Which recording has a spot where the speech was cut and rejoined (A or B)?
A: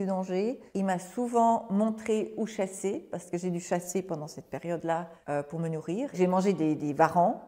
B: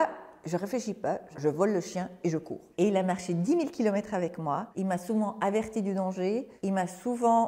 B